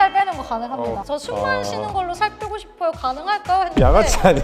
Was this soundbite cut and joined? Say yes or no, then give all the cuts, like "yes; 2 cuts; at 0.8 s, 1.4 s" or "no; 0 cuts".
yes; 1 cut; at 1.0 s